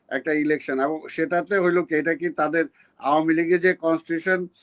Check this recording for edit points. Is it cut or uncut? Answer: uncut